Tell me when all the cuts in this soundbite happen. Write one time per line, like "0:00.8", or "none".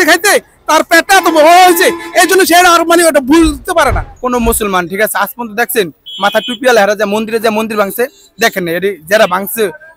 0:04.1